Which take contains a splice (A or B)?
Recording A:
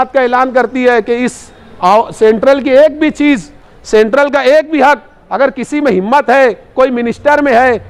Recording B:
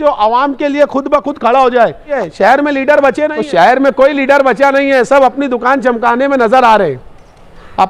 B